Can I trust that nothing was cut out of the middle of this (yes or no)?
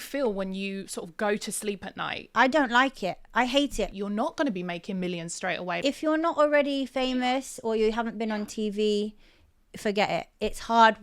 no